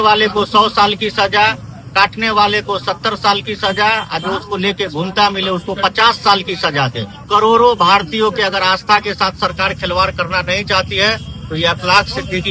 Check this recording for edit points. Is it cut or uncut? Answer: cut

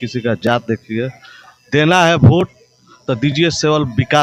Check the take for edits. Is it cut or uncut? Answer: uncut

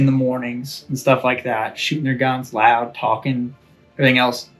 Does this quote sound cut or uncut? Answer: uncut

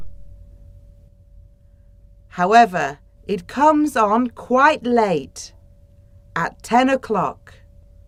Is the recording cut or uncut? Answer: uncut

